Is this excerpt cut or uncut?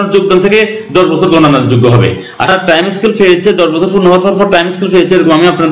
cut